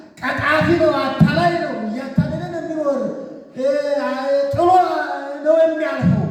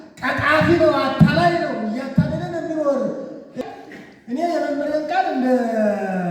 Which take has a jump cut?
second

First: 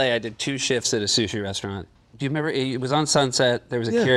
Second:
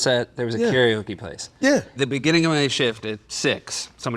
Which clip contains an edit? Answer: second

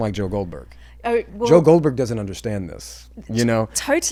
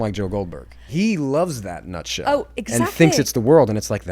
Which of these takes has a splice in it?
second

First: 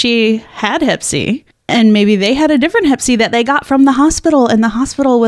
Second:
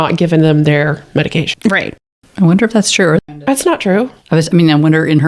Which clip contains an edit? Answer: second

